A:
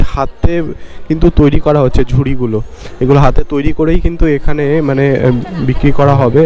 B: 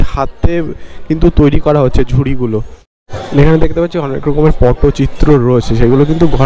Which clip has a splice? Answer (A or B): B